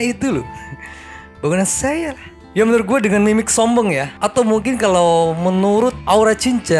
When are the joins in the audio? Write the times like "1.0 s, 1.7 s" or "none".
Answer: none